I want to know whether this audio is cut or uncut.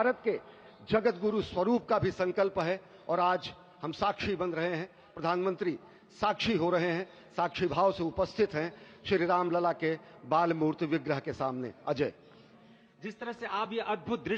uncut